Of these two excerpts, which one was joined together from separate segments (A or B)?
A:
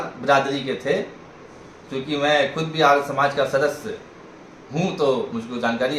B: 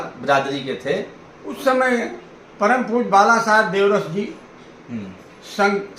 B